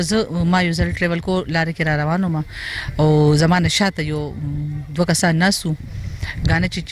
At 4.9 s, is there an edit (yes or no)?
no